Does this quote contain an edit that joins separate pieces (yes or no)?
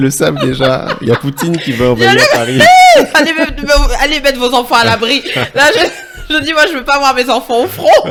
no